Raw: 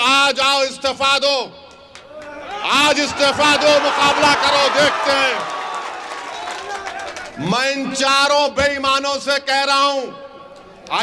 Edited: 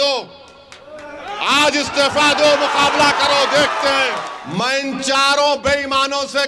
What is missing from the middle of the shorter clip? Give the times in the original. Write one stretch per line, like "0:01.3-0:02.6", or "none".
0:05.6-0:07.3